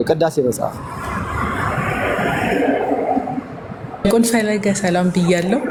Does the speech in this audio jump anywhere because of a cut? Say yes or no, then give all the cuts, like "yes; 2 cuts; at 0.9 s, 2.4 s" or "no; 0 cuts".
no; 0 cuts